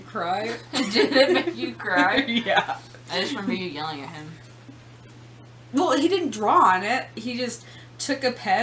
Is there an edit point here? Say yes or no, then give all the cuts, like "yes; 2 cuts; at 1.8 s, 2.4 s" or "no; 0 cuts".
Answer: no; 0 cuts